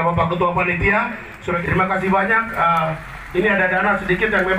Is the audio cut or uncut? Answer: cut